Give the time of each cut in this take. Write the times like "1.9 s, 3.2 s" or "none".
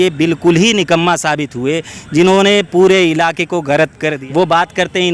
4.1 s